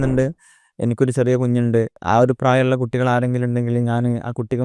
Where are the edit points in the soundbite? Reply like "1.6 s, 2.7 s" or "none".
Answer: 2.0 s